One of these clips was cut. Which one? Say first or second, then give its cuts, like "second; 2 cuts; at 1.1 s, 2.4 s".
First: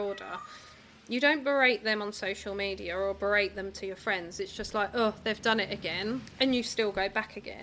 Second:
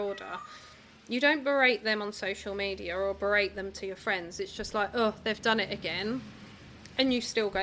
first; 1 cut; at 6.3 s